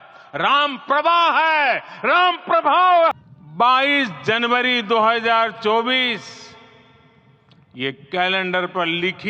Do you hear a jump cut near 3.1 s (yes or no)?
yes